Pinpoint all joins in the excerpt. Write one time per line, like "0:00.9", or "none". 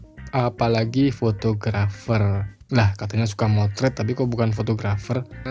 0:02.5